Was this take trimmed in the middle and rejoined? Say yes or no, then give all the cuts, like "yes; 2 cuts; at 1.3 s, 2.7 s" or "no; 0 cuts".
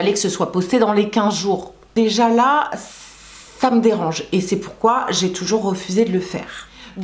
no; 0 cuts